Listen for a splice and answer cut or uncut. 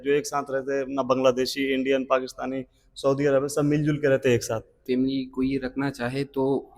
cut